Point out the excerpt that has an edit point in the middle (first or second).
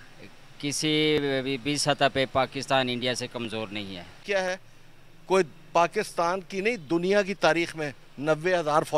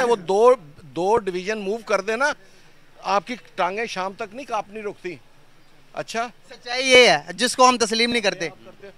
first